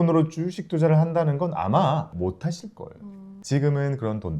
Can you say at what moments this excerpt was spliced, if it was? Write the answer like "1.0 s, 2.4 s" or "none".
2.1 s, 3.3 s